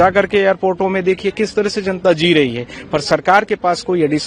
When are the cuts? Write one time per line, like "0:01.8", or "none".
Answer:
none